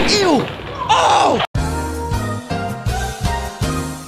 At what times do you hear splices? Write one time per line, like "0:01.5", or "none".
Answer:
none